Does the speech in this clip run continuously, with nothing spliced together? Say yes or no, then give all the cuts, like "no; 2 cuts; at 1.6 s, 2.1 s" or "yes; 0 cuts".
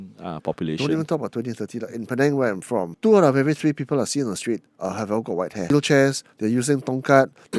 no; 2 cuts; at 2.9 s, 5.7 s